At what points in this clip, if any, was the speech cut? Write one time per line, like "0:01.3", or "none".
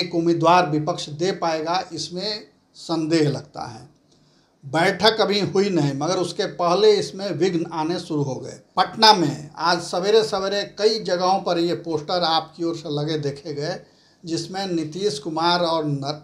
0:08.6